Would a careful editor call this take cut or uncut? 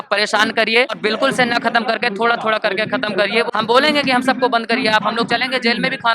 cut